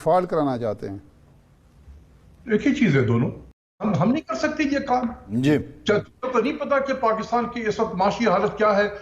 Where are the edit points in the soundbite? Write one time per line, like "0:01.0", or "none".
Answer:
0:03.8